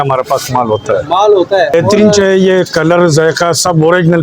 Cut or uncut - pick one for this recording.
cut